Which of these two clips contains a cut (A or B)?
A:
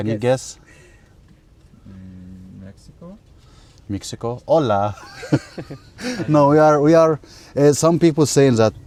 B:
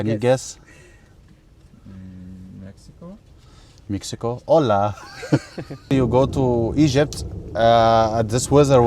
B